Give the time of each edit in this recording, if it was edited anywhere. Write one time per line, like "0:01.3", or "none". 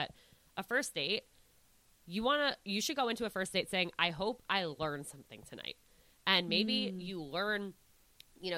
none